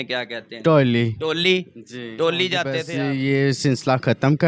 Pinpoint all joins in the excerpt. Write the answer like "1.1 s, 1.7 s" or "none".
2.9 s